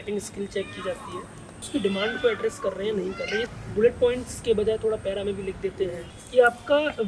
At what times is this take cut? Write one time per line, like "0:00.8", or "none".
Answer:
0:01.6
0:03.5
0:06.1